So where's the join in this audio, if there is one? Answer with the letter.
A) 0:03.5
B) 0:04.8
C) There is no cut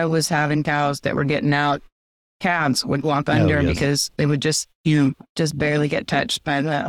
C